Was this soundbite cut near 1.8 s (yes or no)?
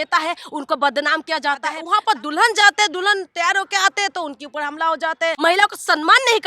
yes